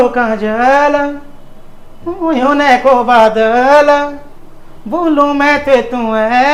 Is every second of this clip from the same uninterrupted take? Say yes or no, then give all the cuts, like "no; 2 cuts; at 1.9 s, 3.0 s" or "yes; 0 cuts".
yes; 0 cuts